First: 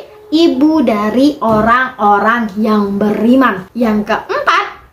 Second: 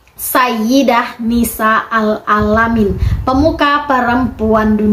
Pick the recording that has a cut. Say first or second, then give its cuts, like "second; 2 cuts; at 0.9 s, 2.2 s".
first; 1 cut; at 3.6 s